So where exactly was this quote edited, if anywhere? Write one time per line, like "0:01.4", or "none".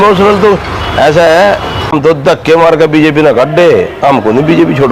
0:01.9